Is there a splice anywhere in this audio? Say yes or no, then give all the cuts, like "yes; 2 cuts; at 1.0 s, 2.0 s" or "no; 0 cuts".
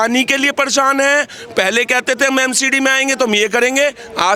no; 0 cuts